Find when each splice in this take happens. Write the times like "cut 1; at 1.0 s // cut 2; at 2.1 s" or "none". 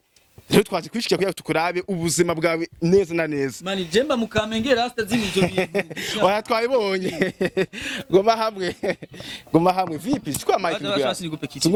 none